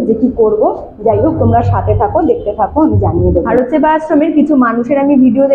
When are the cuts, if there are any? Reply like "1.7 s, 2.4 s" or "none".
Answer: 3.5 s